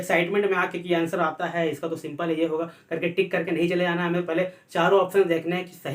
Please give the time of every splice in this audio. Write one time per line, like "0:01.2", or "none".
none